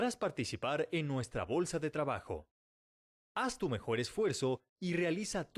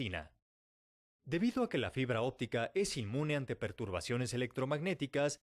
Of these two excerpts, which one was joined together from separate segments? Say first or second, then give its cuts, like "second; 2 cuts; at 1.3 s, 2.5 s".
second; 1 cut; at 4.6 s